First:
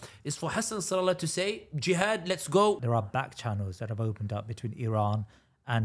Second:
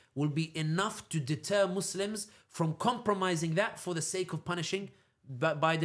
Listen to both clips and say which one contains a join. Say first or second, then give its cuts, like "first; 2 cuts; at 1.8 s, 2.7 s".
first; 1 cut; at 2.8 s